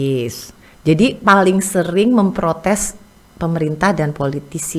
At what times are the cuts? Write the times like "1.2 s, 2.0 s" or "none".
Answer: none